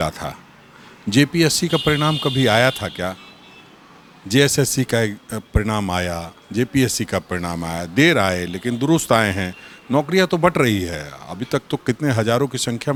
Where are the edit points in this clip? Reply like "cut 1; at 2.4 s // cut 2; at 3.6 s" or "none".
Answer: none